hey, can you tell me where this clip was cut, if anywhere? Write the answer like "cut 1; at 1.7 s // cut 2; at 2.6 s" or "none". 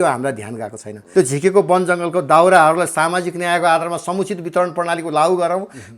cut 1; at 1.0 s